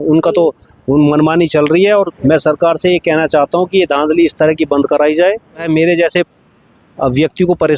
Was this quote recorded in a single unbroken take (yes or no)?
no